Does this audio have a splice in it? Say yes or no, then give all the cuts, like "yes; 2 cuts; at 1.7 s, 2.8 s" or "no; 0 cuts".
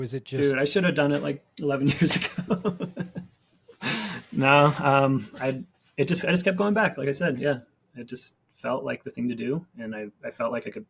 no; 0 cuts